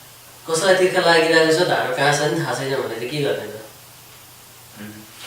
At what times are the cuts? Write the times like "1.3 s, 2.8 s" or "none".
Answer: none